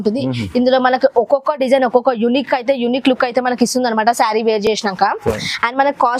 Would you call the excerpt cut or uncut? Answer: uncut